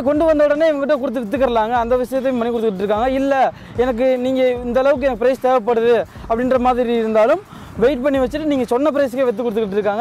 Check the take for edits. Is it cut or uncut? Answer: uncut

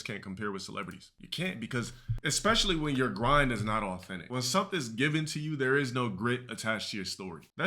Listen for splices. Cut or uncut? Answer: cut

